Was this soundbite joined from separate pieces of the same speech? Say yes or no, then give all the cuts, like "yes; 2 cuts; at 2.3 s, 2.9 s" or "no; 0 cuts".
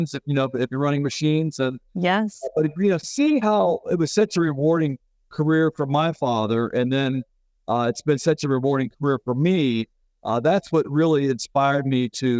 no; 0 cuts